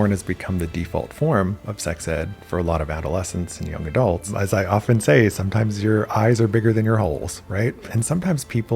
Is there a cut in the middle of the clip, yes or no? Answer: yes